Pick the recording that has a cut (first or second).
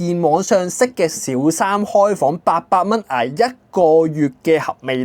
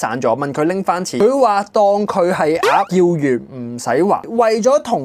second